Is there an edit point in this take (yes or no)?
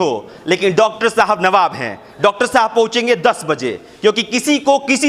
no